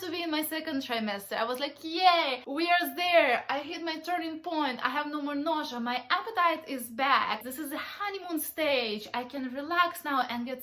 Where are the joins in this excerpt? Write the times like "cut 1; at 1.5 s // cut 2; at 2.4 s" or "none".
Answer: cut 1; at 2.4 s // cut 2; at 7.5 s